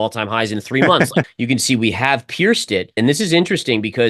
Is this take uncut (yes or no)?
no